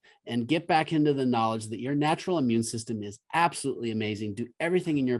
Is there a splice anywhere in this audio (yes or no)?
no